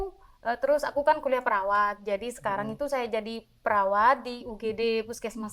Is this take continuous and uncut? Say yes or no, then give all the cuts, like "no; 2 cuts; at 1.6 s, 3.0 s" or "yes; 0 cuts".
yes; 0 cuts